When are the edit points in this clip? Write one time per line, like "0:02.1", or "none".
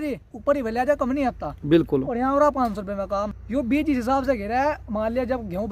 0:03.4